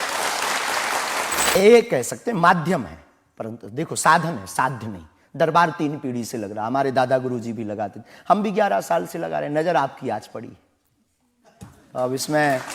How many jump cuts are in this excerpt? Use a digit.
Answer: 1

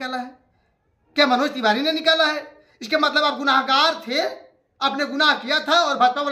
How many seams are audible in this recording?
0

